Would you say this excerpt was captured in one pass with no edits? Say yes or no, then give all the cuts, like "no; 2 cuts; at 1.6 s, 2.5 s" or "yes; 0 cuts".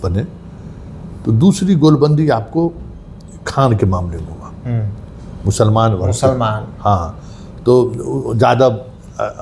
yes; 0 cuts